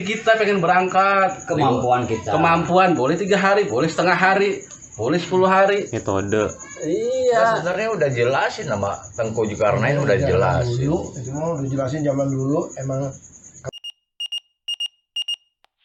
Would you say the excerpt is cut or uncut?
uncut